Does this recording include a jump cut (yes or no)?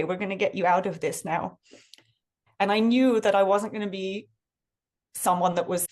no